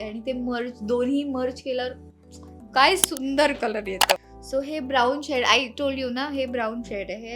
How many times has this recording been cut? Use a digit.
1